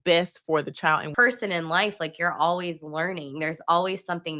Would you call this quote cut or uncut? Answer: cut